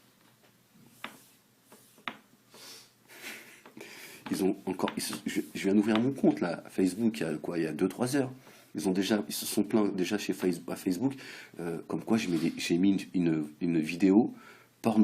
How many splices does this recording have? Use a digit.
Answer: 1